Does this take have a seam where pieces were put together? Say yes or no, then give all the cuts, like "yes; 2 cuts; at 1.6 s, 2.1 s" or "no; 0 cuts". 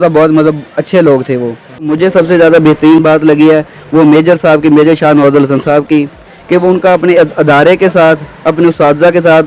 yes; 1 cut; at 1.9 s